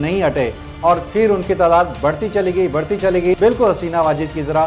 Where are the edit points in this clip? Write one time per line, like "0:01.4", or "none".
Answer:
0:03.4